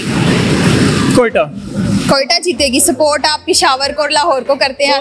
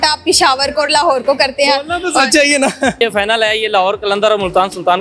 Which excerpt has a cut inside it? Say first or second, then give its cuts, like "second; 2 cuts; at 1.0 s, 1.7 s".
second; 1 cut; at 3.0 s